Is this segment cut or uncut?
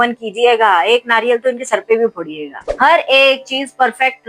cut